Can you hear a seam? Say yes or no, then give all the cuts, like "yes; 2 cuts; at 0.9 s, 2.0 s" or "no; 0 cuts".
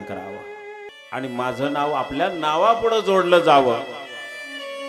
yes; 1 cut; at 0.9 s